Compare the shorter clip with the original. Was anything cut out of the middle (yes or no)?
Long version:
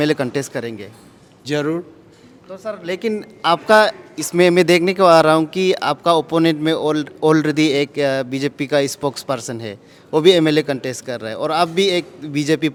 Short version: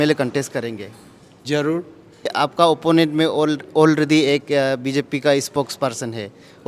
yes